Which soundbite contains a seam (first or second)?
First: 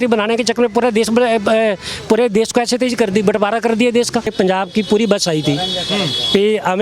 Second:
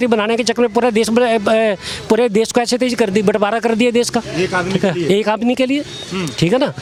first